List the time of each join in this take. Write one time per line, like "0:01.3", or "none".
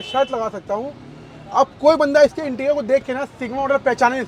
none